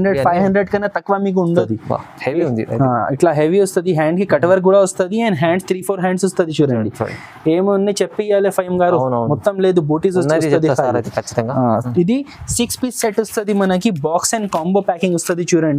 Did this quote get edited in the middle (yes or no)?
yes